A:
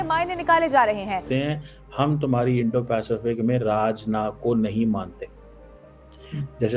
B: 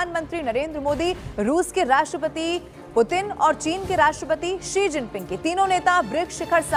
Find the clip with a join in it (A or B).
A